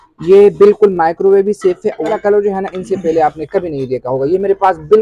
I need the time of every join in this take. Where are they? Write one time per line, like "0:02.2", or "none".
0:02.2